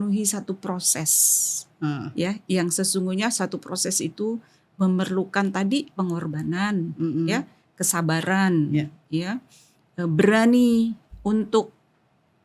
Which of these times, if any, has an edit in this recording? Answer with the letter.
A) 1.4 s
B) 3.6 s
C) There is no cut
C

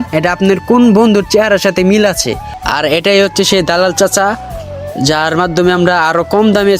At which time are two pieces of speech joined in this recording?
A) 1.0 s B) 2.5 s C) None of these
B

